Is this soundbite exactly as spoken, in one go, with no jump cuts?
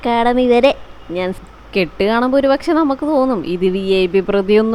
no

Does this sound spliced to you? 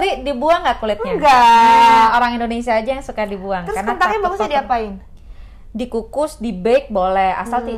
no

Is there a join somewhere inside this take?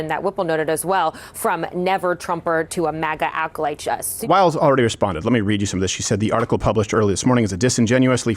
yes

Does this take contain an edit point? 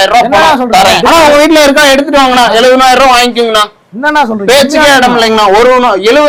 no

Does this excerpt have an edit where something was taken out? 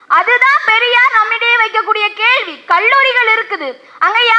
no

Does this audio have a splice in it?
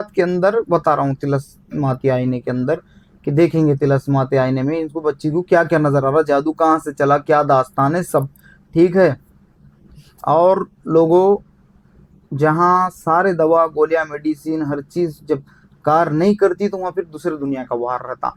no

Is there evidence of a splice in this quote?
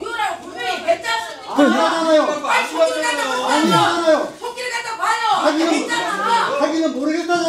no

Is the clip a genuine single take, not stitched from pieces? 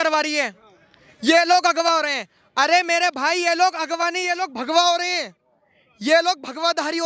yes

